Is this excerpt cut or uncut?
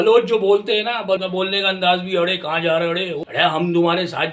cut